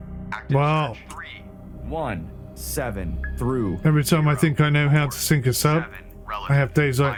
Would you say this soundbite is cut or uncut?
uncut